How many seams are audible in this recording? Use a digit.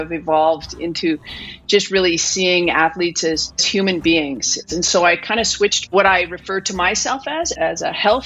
4